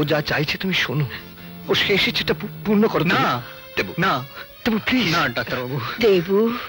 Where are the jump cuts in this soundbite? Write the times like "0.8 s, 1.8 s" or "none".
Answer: none